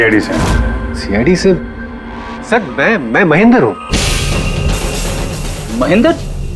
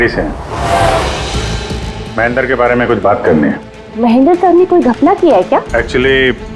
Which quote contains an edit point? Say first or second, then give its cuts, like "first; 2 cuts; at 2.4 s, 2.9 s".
second; 2 cuts; at 3.7 s, 5.7 s